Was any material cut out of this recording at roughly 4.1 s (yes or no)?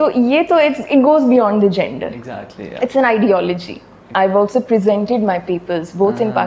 yes